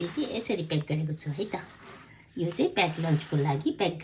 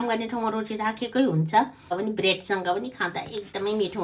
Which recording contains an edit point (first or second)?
second